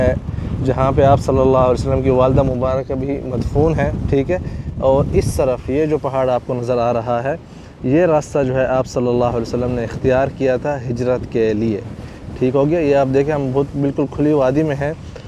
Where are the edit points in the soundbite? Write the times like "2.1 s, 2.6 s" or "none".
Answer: none